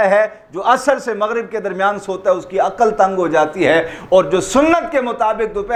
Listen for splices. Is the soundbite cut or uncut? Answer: uncut